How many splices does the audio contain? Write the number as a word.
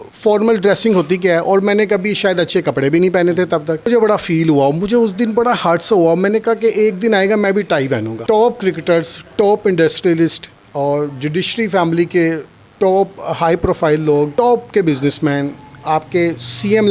three